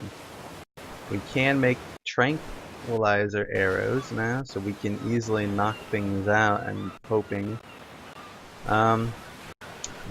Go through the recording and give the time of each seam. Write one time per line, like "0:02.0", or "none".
none